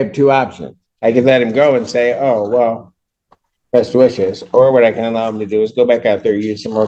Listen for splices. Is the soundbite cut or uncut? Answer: uncut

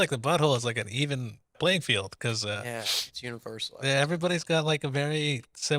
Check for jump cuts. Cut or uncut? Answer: cut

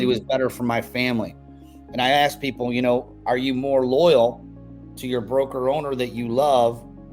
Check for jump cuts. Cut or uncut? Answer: uncut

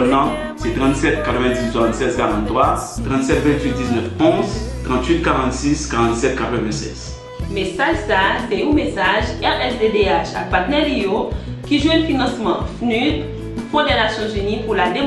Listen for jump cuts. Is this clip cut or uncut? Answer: cut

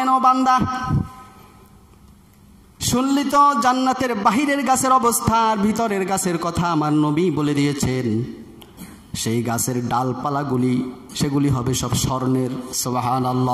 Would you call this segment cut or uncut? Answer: uncut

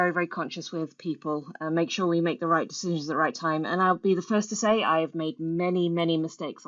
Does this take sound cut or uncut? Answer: uncut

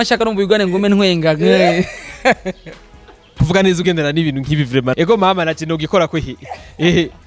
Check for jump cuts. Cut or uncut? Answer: cut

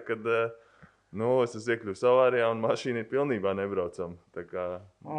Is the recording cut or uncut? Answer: uncut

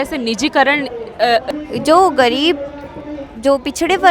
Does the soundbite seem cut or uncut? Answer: cut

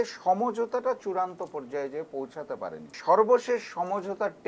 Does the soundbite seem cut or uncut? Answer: cut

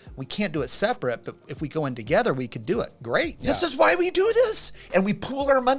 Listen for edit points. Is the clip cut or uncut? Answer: cut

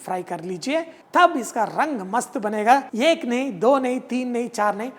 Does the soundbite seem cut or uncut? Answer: cut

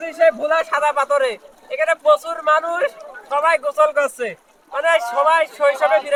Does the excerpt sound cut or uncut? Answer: uncut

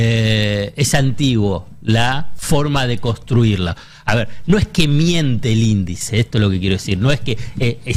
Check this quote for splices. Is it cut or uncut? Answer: uncut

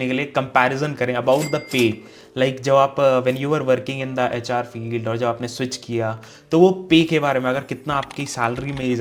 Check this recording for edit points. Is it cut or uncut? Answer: uncut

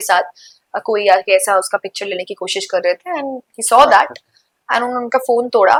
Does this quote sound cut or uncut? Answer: uncut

